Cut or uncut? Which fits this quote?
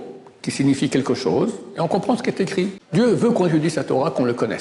cut